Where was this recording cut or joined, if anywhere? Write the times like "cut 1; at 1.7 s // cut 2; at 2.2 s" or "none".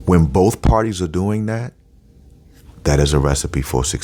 none

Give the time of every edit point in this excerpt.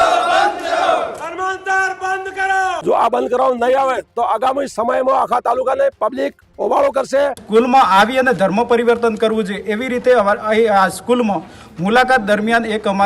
cut 1; at 2.8 s // cut 2; at 7.4 s

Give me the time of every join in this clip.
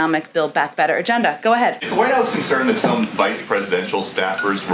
cut 1; at 1.8 s

